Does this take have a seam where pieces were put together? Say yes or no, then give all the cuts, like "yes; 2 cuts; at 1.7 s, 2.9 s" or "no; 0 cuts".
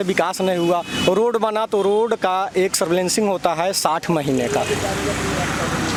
no; 0 cuts